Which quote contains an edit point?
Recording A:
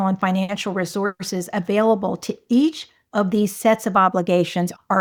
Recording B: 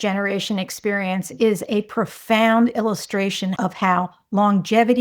B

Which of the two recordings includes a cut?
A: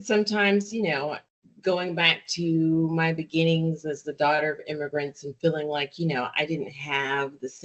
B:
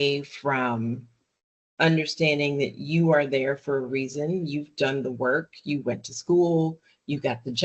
A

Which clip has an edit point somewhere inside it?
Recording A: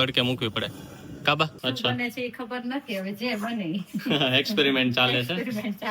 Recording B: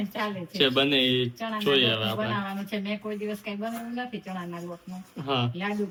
A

